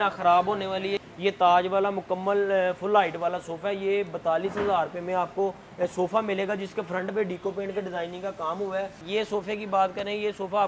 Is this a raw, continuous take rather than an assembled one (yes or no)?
no